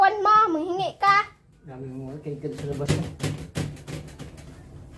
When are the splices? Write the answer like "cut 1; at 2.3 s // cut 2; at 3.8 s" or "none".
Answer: none